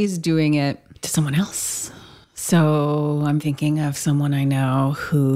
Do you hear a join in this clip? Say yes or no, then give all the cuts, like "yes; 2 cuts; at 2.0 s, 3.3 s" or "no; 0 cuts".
yes; 1 cut; at 0.9 s